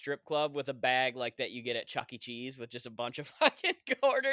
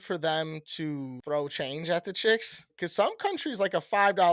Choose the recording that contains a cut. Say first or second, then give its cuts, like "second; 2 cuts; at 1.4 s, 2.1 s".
second; 2 cuts; at 1.2 s, 2.7 s